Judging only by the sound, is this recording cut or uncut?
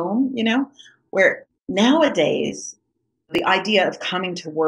cut